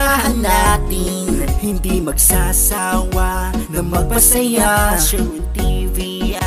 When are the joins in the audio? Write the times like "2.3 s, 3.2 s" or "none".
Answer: none